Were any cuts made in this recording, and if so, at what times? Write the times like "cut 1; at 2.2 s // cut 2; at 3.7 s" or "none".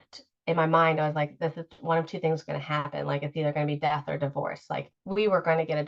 cut 1; at 4.9 s